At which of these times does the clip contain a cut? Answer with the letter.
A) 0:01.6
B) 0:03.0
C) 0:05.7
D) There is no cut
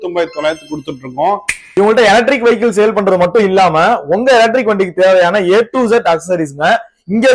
A